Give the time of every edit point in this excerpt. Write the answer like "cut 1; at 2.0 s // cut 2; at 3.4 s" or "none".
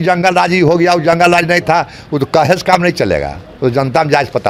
none